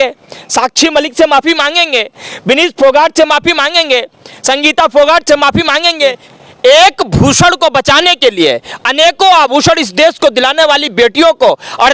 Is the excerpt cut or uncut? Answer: cut